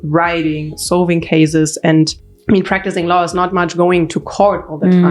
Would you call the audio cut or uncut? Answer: cut